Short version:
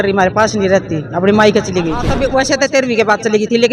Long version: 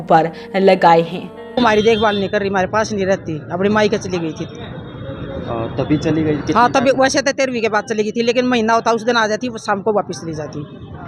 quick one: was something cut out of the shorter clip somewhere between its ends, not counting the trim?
yes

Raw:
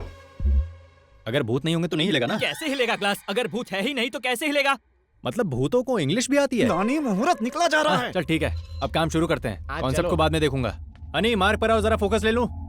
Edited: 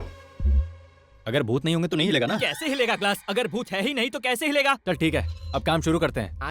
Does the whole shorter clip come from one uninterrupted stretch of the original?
no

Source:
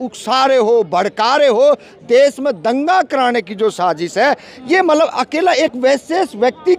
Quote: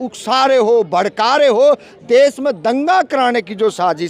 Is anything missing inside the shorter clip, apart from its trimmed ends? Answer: no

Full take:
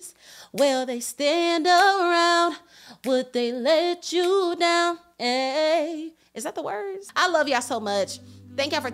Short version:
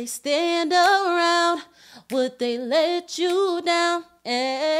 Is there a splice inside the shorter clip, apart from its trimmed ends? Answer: no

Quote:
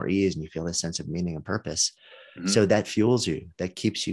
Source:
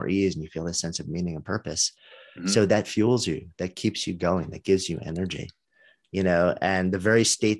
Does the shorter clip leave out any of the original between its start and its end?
no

